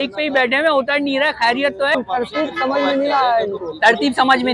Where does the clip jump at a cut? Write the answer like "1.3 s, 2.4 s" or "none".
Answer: 1.9 s